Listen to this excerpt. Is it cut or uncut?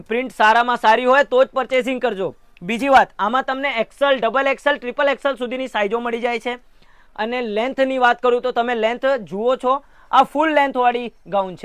uncut